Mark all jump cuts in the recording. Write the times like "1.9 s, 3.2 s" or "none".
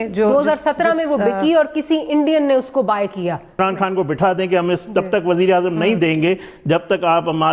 3.6 s